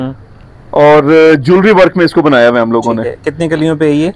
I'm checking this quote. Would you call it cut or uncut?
uncut